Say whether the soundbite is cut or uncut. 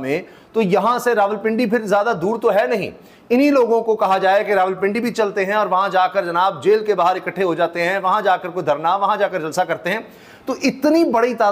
uncut